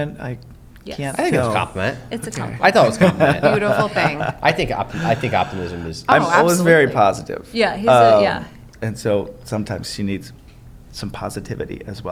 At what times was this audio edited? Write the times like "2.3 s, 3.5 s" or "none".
none

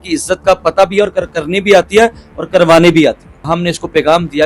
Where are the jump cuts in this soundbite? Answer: 3.4 s

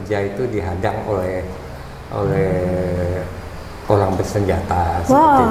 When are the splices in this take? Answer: none

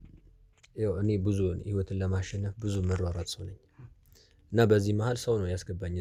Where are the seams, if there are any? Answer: none

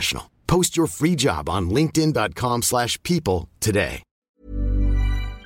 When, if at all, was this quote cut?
4.3 s

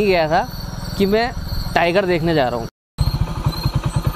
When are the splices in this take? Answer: 2.8 s

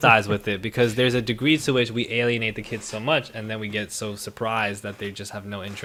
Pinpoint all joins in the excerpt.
none

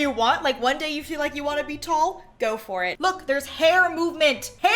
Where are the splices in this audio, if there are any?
2.9 s

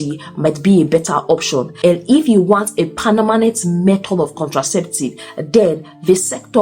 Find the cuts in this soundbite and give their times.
1.7 s, 5.3 s

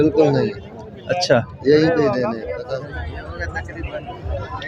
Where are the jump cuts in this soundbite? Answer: 2.5 s

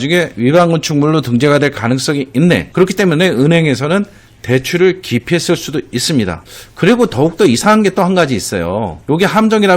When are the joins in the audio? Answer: 2.7 s, 6.4 s

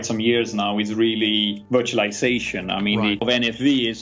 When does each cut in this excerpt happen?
1.6 s, 3.2 s

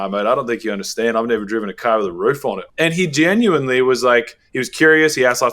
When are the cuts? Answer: 2.6 s

